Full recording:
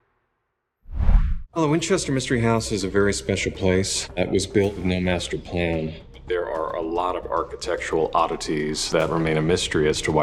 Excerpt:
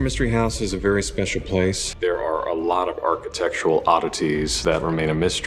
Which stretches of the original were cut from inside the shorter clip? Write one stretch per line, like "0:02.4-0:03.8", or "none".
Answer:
0:04.0-0:06.1